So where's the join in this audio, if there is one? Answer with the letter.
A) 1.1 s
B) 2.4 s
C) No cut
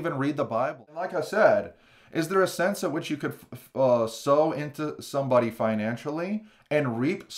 A